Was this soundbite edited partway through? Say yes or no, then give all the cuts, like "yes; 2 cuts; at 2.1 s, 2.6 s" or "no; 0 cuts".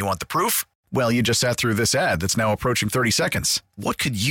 no; 0 cuts